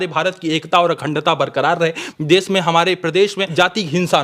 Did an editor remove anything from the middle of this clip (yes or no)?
yes